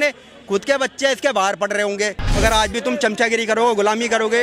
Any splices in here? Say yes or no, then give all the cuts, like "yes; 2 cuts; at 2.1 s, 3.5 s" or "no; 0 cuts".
yes; 1 cut; at 2.2 s